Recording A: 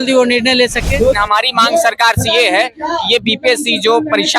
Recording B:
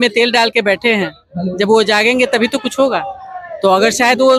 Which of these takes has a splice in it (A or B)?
A